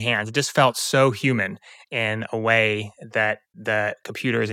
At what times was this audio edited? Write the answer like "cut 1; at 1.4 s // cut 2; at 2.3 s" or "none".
cut 1; at 3.5 s